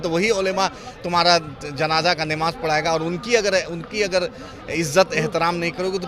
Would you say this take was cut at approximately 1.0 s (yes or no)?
no